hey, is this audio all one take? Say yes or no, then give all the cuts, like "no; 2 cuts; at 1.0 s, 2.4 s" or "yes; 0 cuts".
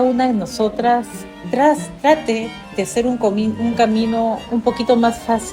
yes; 0 cuts